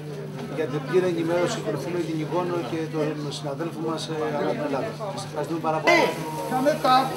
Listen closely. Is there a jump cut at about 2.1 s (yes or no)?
no